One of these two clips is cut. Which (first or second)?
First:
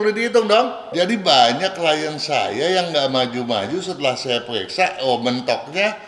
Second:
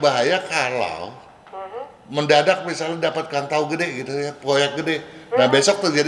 first